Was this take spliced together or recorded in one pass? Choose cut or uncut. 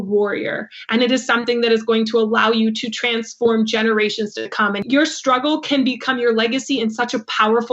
cut